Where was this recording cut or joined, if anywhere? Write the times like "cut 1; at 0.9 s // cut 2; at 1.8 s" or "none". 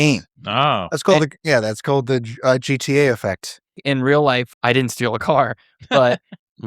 cut 1; at 3.8 s // cut 2; at 4.5 s